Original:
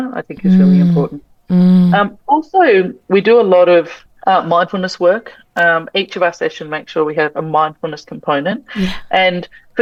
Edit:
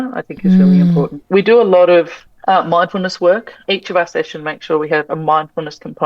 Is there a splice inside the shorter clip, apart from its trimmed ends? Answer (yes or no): yes